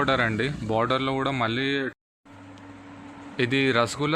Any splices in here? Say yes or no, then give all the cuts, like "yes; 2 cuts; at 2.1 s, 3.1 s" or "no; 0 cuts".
yes; 1 cut; at 2.0 s